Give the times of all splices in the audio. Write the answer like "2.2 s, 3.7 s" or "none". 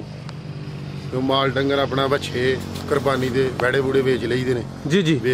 none